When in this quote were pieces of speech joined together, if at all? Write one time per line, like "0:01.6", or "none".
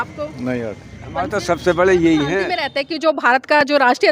0:02.6